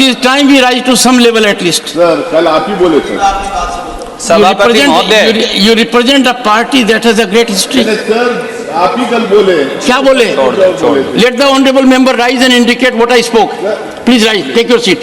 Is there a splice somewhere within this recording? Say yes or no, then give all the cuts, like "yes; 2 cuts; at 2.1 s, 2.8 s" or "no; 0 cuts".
no; 0 cuts